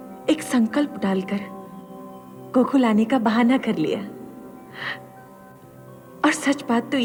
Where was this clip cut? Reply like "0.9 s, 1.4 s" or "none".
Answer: none